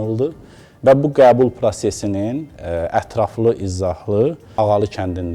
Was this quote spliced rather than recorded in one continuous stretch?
yes; 1 cut; at 4.4 s

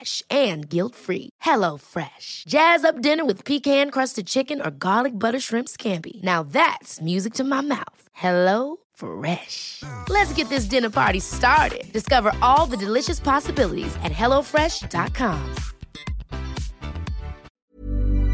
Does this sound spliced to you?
yes; 1 cut; at 17.4 s

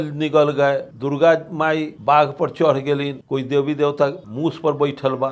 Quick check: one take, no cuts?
no; 4 cuts; at 0.9 s, 1.9 s, 3.2 s, 4.2 s

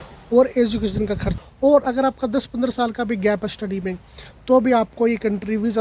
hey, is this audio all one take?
no; 1 cut; at 1.3 s

